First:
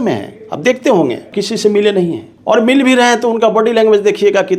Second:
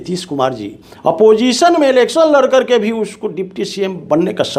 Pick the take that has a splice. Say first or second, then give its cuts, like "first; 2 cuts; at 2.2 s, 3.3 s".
first; 2 cuts; at 1.3 s, 2.3 s